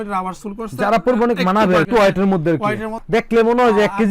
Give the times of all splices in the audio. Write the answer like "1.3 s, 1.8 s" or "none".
1.9 s, 2.9 s